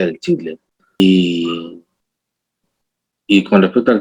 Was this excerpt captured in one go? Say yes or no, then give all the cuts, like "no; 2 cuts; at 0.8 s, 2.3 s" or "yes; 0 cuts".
no; 1 cut; at 1.0 s